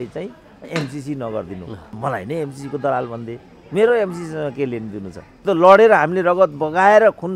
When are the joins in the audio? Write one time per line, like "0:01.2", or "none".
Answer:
0:01.8
0:05.4